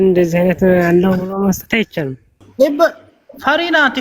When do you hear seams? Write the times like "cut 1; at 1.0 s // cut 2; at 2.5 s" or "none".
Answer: cut 1; at 2.4 s